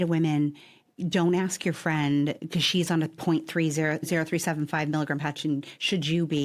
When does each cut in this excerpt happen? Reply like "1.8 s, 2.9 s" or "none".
4.0 s